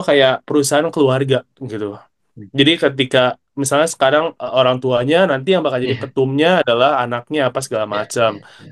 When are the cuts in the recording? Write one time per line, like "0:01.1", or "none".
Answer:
none